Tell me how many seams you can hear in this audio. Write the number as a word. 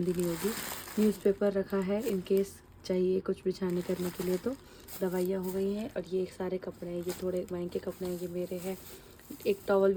zero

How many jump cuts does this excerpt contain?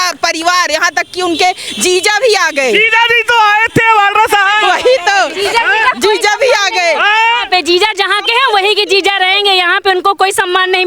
zero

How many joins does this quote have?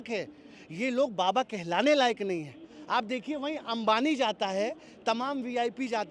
one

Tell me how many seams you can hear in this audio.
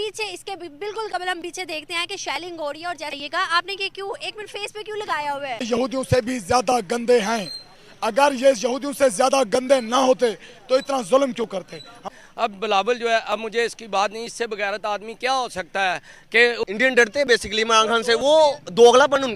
four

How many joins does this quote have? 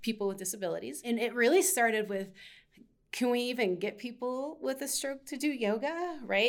one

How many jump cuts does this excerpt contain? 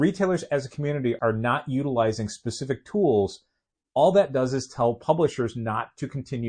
one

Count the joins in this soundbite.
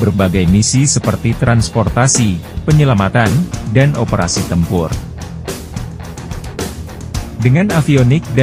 two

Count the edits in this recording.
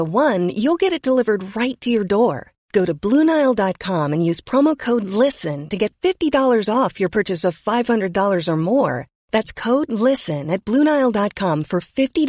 zero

